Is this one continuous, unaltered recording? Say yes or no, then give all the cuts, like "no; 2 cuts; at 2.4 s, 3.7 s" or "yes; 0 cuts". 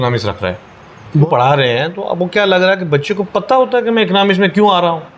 no; 1 cut; at 1.2 s